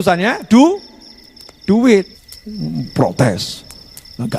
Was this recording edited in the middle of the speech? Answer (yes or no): yes